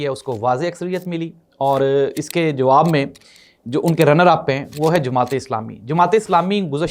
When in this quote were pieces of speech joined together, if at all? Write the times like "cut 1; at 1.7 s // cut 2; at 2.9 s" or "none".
none